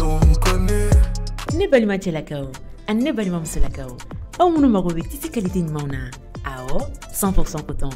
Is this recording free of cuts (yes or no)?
yes